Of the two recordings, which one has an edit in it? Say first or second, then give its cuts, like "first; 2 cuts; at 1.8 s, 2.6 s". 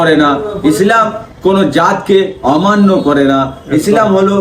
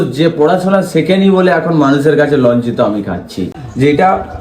second; 1 cut; at 3.5 s